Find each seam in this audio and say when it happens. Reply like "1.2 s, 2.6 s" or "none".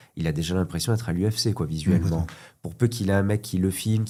none